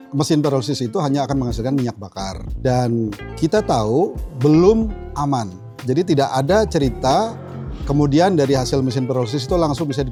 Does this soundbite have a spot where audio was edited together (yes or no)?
no